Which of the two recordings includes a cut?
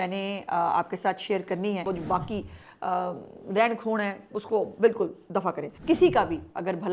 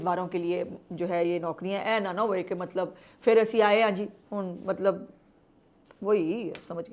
first; 2 cuts; at 1.9 s, 5.7 s

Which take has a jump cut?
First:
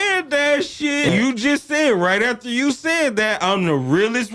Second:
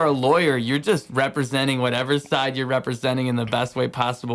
first; 1 cut; at 1.1 s

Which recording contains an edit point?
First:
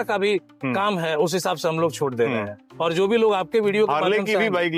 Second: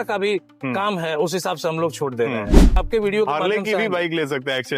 second; 1 cut; at 2.8 s

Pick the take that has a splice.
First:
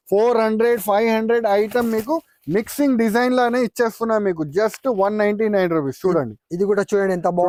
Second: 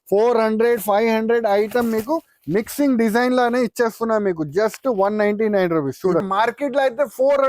second; 1 cut; at 6.3 s

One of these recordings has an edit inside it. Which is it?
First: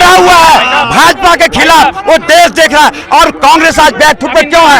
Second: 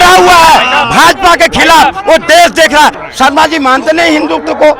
second; 1 cut; at 3.0 s

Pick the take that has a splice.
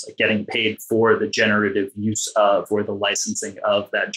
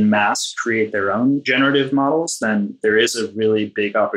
second; 2 cuts; at 1.5 s, 2.8 s

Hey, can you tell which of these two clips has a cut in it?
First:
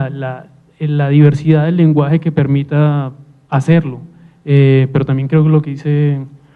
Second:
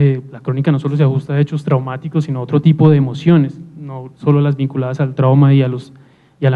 second; 1 cut; at 1.8 s

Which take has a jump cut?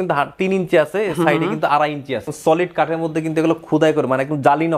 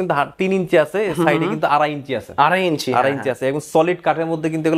first; 1 cut; at 2.3 s

